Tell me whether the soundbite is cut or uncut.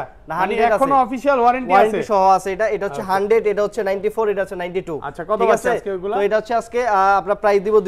uncut